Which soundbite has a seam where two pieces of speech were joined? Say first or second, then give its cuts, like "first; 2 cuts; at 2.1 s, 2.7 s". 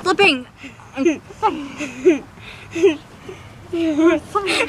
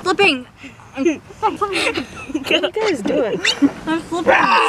second; 1 cut; at 1.6 s